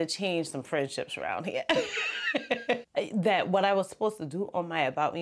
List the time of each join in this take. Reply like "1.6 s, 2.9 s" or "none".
2.8 s